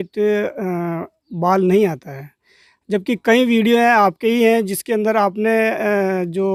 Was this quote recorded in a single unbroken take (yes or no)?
yes